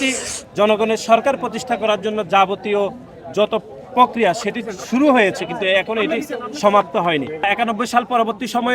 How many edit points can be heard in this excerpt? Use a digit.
1